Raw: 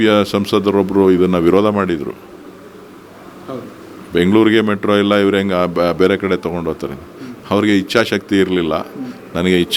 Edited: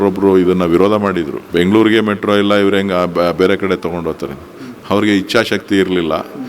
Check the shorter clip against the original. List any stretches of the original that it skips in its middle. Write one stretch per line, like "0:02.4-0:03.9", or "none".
0:02.1-0:04.0